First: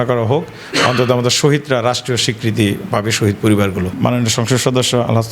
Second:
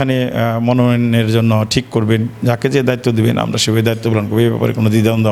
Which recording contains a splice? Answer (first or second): first